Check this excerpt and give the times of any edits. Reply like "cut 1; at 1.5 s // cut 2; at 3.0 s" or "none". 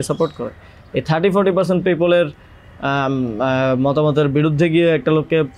none